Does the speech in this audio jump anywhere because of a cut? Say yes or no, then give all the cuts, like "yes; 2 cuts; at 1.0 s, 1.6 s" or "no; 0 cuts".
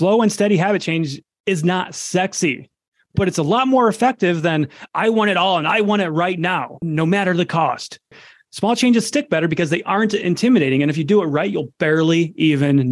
yes; 2 cuts; at 6.7 s, 8.3 s